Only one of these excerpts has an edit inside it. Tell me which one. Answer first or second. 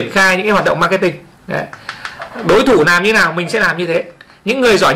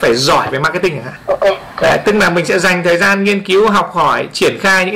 second